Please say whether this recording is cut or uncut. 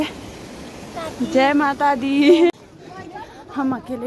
cut